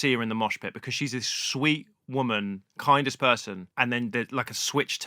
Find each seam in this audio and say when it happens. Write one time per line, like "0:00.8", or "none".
0:03.6